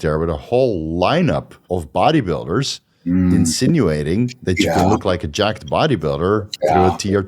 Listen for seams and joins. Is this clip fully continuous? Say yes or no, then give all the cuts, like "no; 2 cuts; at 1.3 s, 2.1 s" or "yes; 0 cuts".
no; 1 cut; at 1.5 s